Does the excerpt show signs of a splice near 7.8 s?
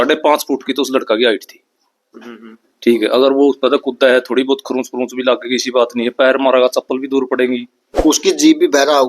yes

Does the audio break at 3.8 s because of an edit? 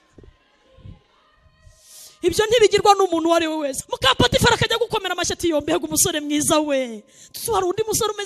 yes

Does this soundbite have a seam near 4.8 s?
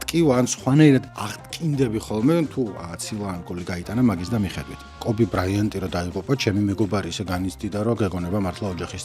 yes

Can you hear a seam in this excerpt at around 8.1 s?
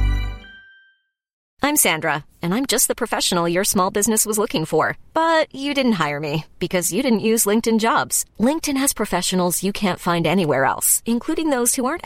no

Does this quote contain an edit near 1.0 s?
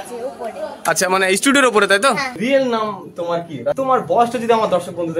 no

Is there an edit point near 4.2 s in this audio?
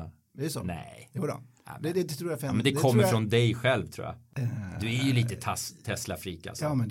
yes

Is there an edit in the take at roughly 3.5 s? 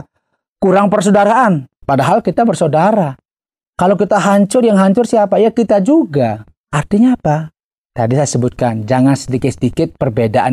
no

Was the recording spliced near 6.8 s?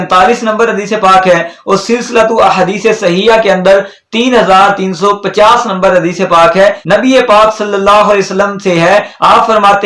yes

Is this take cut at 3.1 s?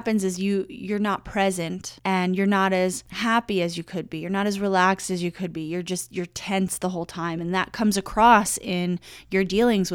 yes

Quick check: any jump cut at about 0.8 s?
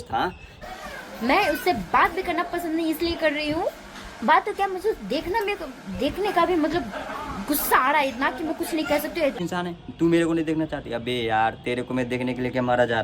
yes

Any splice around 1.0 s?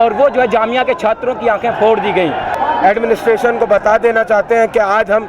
no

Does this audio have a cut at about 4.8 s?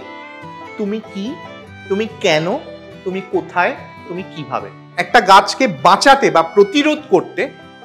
yes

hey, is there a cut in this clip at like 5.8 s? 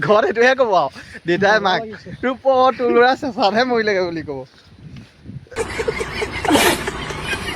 yes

